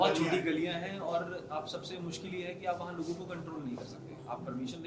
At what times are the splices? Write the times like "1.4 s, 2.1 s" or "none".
none